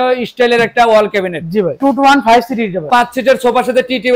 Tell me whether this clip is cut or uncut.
cut